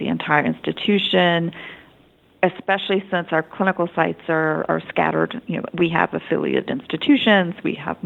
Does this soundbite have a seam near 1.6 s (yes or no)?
no